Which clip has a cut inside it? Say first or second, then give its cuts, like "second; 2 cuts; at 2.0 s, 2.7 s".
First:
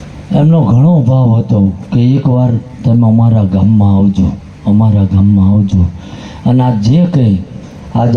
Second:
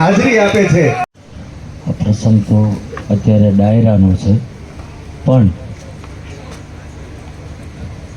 second; 1 cut; at 1.1 s